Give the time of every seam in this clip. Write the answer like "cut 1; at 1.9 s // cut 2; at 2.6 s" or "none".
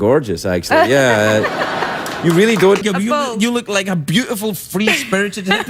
cut 1; at 2.8 s